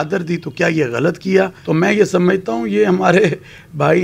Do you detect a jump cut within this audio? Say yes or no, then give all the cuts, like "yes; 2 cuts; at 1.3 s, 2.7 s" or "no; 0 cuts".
yes; 1 cut; at 1.6 s